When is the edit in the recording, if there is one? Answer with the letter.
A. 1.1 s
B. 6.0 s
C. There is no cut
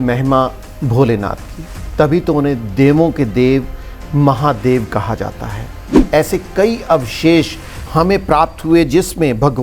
B